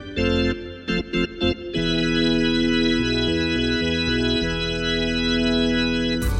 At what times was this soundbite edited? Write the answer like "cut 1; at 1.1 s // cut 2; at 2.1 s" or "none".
cut 1; at 5.5 s